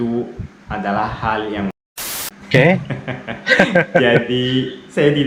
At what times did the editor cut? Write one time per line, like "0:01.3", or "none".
0:01.8